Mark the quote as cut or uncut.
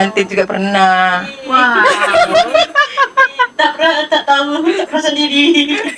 uncut